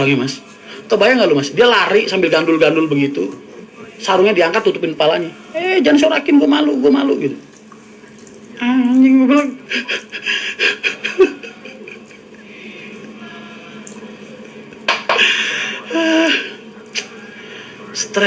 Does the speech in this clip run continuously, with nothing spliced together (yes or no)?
yes